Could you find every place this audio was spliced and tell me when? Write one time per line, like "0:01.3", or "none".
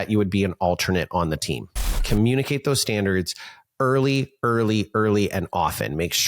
0:01.9